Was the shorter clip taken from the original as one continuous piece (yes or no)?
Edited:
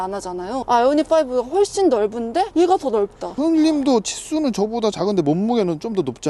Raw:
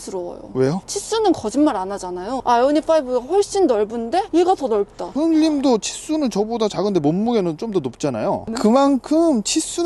yes